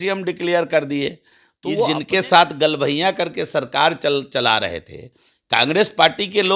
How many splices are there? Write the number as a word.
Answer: one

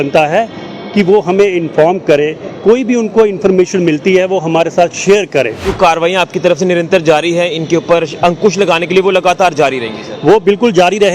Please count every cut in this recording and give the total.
one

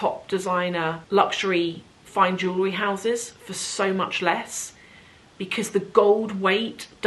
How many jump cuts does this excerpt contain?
one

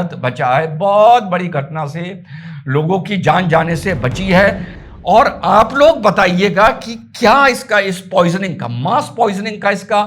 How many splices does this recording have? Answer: one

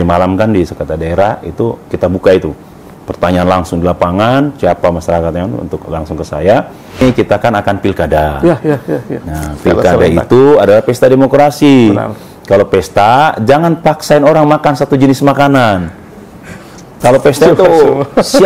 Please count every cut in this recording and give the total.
one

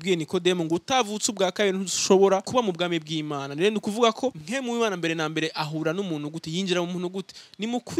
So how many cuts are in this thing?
two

